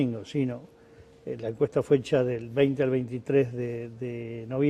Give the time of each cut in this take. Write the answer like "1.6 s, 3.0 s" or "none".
3.5 s